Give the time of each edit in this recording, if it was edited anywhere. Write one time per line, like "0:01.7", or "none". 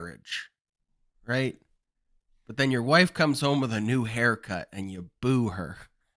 none